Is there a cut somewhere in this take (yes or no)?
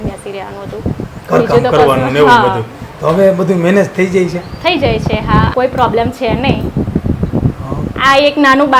yes